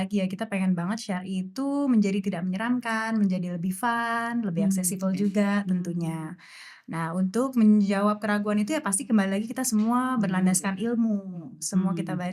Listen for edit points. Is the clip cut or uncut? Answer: uncut